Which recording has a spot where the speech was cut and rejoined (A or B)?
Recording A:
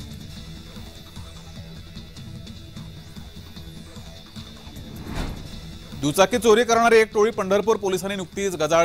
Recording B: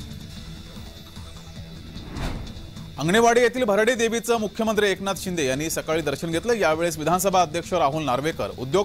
B